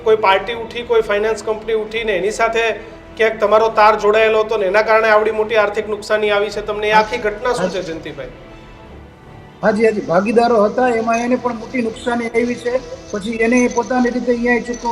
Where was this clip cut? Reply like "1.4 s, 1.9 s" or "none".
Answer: none